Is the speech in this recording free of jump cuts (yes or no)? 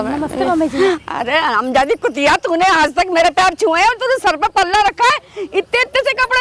yes